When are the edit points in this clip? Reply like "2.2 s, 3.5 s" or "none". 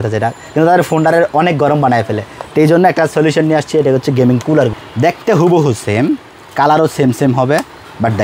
4.8 s